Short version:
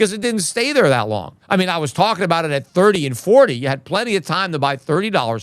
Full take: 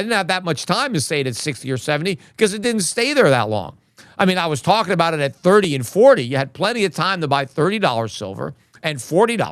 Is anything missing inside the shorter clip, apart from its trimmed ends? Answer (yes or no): yes